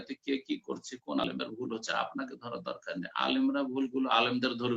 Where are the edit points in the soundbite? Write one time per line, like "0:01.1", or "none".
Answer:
0:01.2